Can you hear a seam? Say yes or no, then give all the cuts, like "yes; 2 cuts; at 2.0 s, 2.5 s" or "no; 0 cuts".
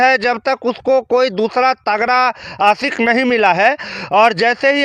no; 0 cuts